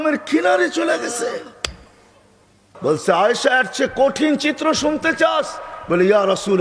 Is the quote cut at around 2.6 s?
yes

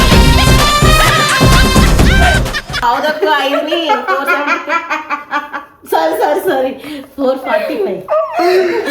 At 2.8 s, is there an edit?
yes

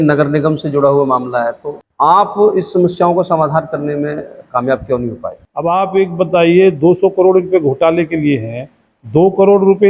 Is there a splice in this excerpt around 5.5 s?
yes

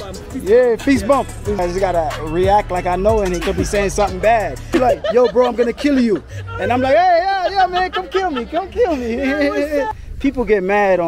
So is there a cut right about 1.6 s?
yes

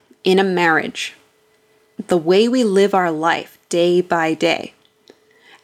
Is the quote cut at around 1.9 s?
yes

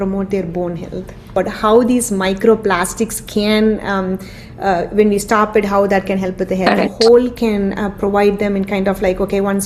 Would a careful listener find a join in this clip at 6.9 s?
yes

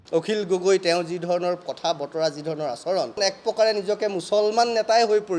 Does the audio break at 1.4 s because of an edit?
no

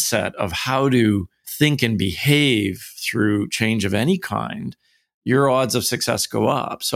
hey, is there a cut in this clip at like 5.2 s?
no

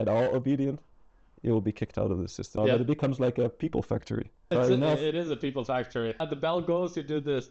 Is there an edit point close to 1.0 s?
no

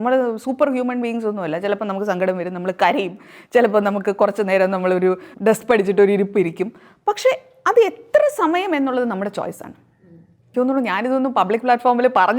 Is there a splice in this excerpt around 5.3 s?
yes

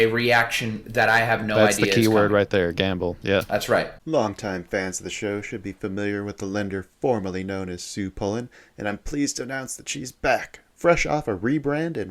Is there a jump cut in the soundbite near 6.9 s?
no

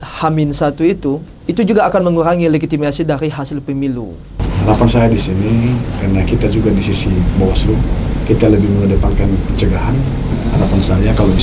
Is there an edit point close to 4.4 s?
yes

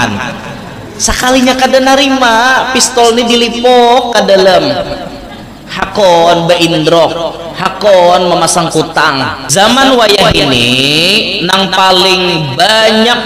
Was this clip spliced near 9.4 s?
yes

